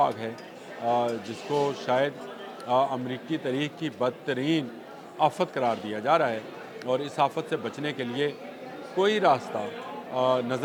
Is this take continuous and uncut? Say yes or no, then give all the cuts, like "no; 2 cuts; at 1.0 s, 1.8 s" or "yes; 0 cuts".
yes; 0 cuts